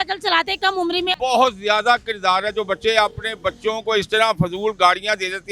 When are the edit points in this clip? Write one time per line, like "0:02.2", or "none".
0:01.2